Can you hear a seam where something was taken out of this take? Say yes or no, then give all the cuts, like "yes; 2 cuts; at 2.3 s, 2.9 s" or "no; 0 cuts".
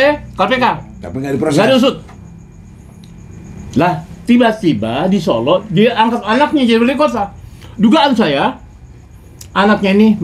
no; 0 cuts